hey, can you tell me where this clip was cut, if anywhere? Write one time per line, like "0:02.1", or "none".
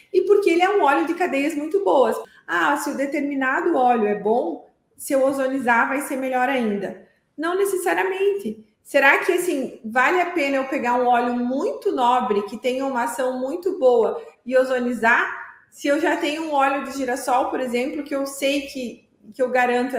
0:02.3